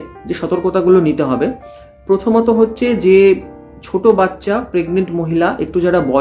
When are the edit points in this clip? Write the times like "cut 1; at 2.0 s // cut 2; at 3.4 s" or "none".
none